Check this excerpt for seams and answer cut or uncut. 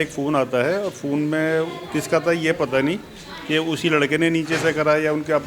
uncut